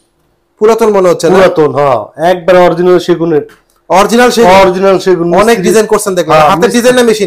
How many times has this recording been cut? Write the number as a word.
zero